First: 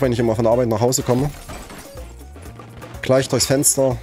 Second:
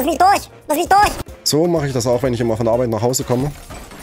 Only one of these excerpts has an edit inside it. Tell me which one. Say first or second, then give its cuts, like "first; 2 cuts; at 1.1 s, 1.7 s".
second; 1 cut; at 1.3 s